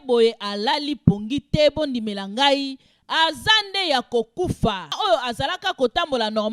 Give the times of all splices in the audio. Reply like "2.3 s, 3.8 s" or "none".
5.0 s